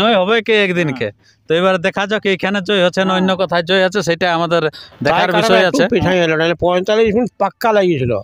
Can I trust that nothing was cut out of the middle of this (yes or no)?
no